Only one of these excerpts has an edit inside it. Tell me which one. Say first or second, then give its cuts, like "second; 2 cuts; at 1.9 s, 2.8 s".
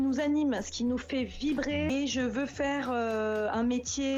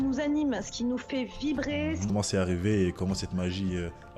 second; 1 cut; at 2.0 s